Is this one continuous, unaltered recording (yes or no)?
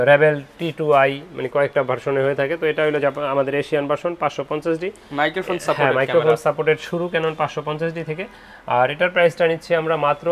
yes